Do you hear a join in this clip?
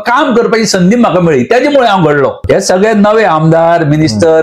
yes; 1 cut; at 2.4 s

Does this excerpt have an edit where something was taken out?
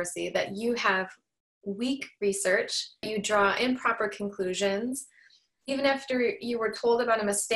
yes; 1 cut; at 3.1 s

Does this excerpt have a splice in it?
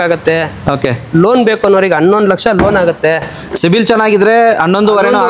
no; 0 cuts

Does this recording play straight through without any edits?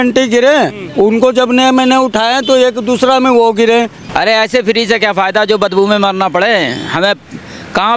no; 1 cut; at 4.0 s

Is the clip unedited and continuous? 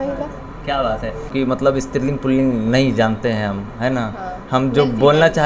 no; 1 cut; at 1.3 s

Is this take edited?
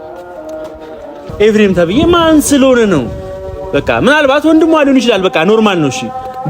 yes; 1 cut; at 1.1 s

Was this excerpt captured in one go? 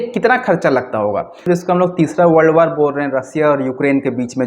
no; 1 cut; at 1.5 s

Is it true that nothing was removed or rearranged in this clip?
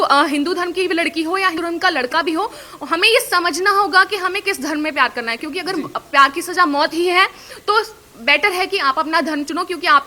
no; 1 cut; at 1.6 s

